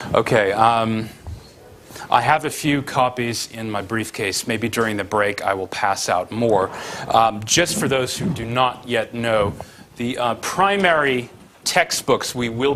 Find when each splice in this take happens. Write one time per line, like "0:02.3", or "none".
none